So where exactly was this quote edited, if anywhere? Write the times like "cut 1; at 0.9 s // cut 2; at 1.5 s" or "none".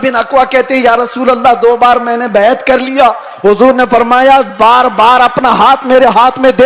none

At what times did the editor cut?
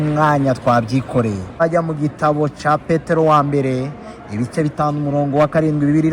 cut 1; at 1.6 s

